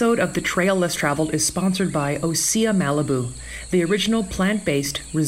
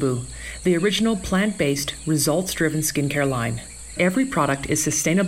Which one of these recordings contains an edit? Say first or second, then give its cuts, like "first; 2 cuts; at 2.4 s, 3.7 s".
second; 1 cut; at 4.0 s